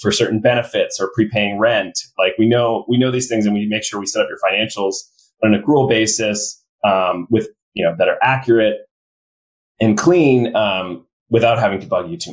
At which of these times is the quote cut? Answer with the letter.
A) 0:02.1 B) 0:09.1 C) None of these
C